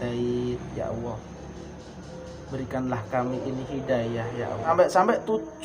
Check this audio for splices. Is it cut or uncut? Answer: cut